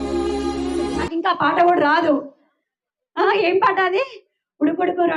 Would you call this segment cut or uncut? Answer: cut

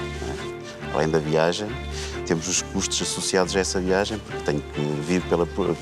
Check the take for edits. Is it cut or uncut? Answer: uncut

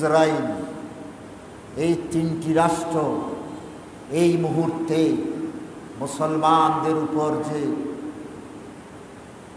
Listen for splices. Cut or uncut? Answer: uncut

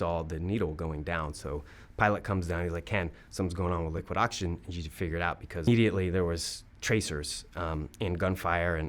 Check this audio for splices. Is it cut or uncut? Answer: cut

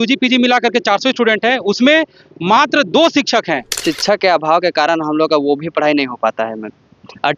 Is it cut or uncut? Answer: cut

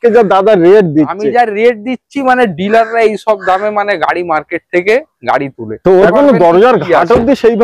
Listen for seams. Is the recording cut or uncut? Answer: cut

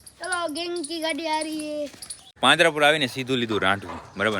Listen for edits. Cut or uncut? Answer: cut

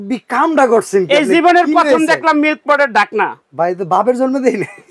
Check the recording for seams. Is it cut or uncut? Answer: uncut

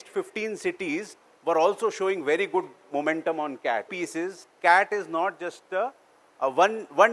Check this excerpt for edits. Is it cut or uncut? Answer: cut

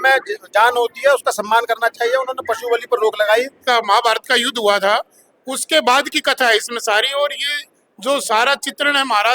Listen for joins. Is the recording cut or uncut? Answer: cut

